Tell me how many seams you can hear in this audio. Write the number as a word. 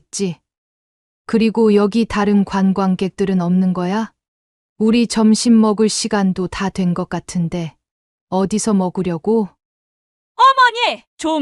one